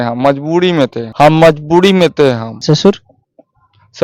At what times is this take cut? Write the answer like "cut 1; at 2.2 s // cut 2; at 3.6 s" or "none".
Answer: none